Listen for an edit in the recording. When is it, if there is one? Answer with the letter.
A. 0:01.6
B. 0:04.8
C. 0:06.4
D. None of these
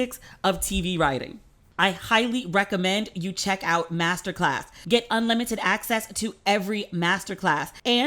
A